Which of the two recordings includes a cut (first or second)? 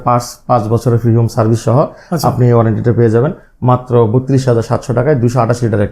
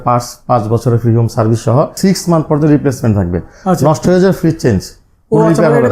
second